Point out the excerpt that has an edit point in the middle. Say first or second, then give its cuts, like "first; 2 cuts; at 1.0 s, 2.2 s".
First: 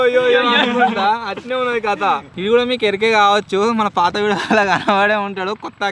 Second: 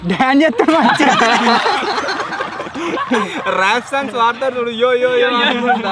first; 1 cut; at 2.3 s